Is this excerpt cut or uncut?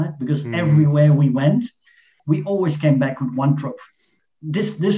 cut